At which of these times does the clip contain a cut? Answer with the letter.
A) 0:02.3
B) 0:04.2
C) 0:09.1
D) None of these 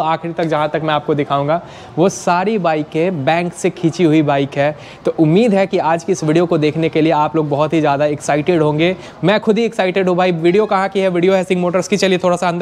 D